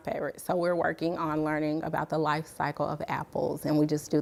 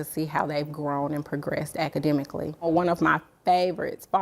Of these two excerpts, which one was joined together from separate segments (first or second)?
second